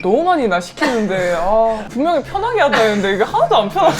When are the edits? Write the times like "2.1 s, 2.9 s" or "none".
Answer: 1.9 s

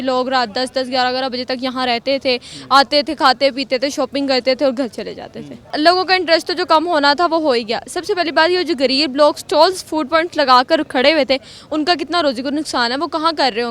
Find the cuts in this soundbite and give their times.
none

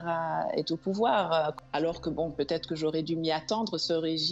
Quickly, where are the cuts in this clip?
1.5 s

